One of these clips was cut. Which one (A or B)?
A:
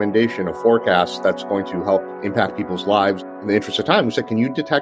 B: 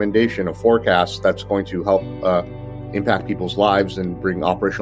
A